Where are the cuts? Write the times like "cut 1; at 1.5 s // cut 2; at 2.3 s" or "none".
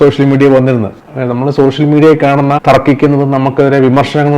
cut 1; at 1.0 s // cut 2; at 2.6 s

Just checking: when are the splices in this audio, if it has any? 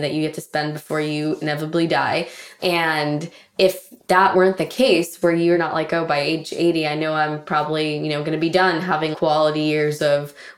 cut 1; at 2.4 s // cut 2; at 4.3 s // cut 3; at 5.6 s // cut 4; at 9.1 s

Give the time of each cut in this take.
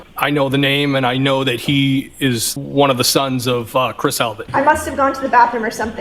cut 1; at 2.5 s // cut 2; at 4.4 s

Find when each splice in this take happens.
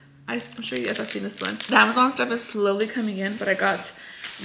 cut 1; at 1.5 s

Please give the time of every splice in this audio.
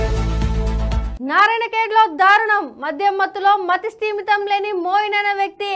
cut 1; at 1.1 s

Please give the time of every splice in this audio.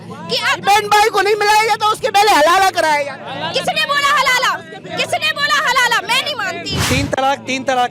cut 1; at 6.7 s

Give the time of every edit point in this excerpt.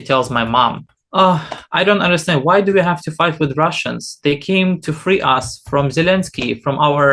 cut 1; at 0.9 s

